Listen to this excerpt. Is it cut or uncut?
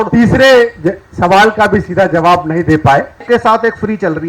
cut